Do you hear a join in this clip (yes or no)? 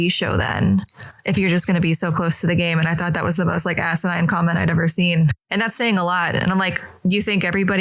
yes